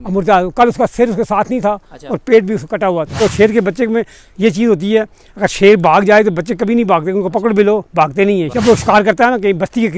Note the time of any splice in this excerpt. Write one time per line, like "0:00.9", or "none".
0:03.2
0:08.5